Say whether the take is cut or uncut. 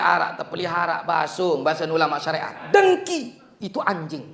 cut